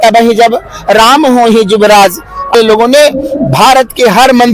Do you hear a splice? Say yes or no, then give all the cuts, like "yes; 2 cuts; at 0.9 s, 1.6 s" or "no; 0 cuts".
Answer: yes; 1 cut; at 2.5 s